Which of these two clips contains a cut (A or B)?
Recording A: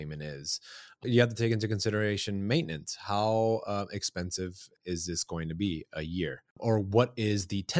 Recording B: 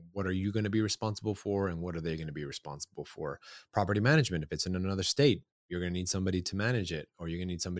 A